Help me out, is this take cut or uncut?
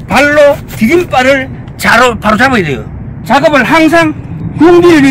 cut